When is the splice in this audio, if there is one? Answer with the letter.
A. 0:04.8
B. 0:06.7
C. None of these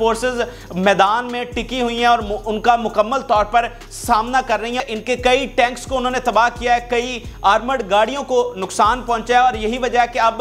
A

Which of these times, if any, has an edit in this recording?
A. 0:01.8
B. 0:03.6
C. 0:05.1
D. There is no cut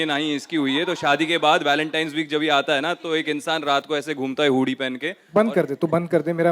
C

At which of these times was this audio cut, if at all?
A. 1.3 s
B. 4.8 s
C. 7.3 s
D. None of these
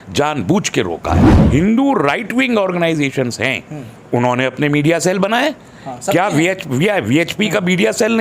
A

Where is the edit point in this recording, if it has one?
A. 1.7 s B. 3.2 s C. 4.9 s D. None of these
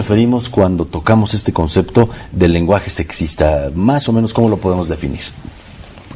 B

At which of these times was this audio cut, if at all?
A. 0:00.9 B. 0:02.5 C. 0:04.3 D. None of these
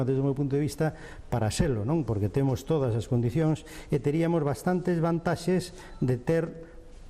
B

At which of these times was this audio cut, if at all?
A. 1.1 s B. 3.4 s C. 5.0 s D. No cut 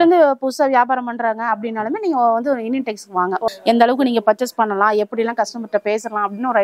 B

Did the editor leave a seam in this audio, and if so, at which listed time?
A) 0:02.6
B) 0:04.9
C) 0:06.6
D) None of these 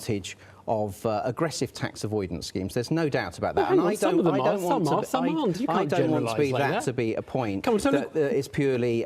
C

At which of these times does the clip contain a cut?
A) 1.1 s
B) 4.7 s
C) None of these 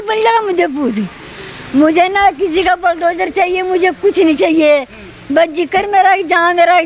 C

